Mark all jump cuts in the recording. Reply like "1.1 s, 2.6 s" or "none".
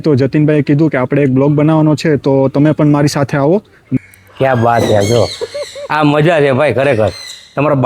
3.8 s